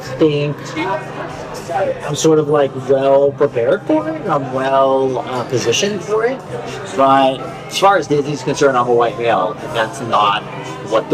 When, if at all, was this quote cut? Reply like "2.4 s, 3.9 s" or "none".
7.4 s